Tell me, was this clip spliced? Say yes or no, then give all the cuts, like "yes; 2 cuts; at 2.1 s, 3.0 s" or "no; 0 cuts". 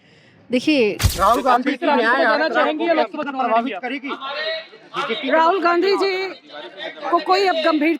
yes; 1 cut; at 1.0 s